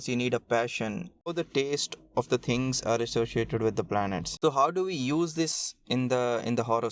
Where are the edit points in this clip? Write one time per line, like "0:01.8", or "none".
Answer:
0:01.3
0:04.3